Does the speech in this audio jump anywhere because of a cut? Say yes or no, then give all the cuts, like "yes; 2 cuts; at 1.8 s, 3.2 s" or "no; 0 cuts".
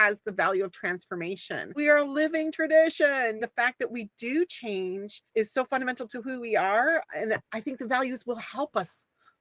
yes; 4 cuts; at 1.7 s, 3.4 s, 5.1 s, 7.5 s